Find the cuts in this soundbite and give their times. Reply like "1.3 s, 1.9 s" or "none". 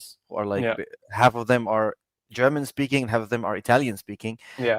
none